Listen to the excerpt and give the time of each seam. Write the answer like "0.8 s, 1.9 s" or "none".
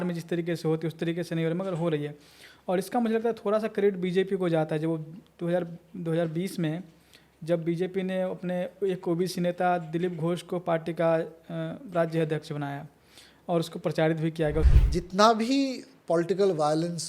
14.7 s